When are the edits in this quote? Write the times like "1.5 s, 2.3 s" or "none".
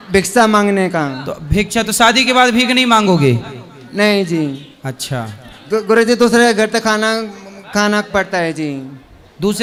none